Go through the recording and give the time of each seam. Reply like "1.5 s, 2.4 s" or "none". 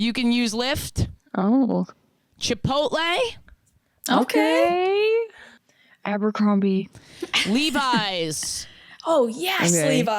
5.4 s